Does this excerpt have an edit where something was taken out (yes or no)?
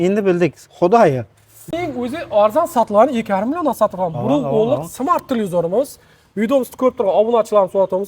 yes